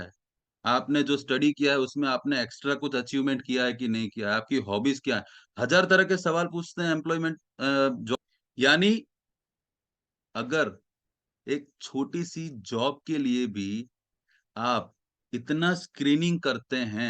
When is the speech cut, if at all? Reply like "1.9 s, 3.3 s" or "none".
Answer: 8.2 s